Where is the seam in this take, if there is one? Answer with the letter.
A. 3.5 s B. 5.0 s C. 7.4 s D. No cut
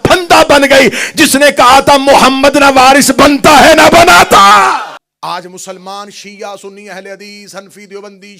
B